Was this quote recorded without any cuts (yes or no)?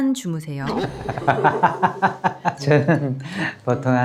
yes